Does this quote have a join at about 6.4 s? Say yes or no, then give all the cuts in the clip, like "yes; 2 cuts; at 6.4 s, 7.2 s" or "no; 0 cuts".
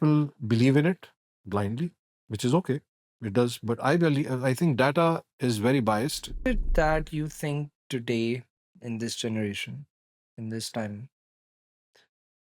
yes; 1 cut; at 6.4 s